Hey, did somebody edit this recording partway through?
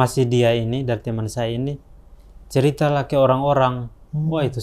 no; 0 cuts

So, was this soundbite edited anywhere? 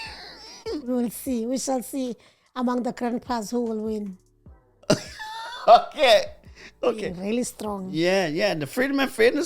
yes; 1 cut; at 7.1 s

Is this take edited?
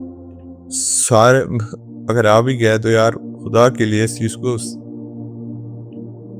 yes; 1 cut; at 1.1 s

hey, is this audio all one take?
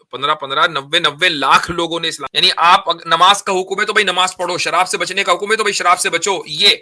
no; 1 cut; at 2.2 s

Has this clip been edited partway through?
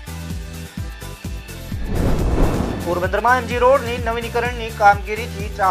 no; 0 cuts

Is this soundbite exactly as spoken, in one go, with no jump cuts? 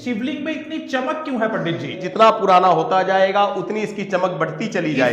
no; 1 cut; at 2.1 s

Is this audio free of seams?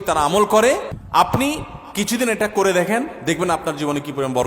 no; 1 cut; at 0.9 s

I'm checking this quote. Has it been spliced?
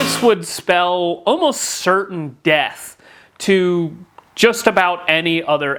no; 0 cuts

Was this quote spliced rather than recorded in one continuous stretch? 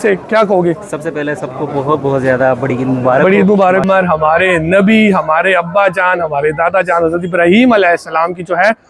yes; 1 cut; at 3.8 s

